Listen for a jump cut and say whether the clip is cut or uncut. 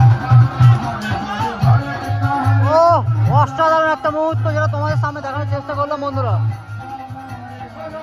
uncut